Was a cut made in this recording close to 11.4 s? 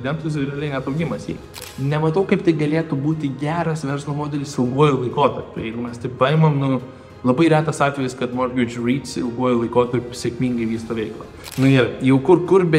yes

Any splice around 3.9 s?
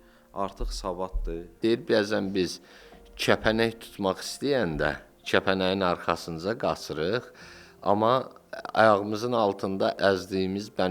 no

